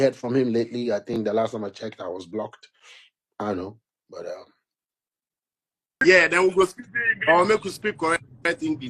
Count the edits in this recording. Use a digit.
1